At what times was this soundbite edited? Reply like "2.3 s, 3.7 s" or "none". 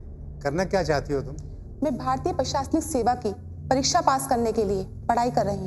none